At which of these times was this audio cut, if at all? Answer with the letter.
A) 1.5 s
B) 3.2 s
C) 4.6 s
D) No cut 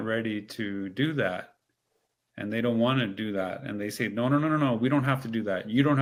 D